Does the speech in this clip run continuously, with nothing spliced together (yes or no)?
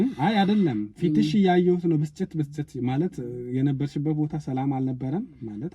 yes